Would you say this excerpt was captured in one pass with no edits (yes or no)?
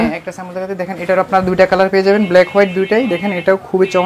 yes